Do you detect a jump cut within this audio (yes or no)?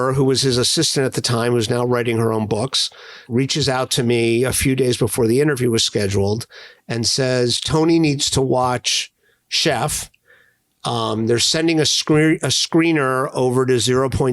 yes